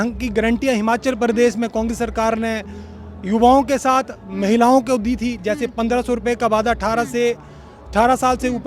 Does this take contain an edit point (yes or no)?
no